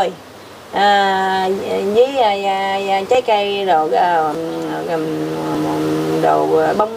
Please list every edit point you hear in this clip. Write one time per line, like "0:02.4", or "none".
none